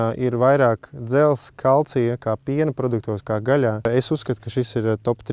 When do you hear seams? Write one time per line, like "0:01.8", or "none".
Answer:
0:03.8